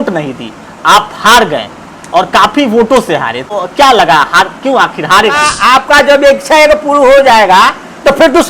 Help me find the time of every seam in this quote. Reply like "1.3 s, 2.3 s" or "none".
3.5 s, 5.5 s